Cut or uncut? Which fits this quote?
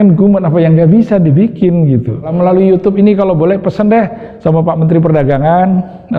cut